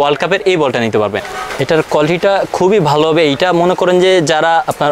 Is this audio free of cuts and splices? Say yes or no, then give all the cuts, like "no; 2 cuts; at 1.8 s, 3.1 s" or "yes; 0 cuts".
no; 1 cut; at 1.3 s